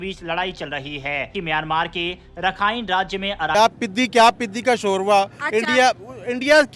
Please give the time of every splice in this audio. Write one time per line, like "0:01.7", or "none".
0:01.3
0:03.5